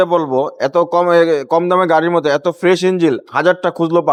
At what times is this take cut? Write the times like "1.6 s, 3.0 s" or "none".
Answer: none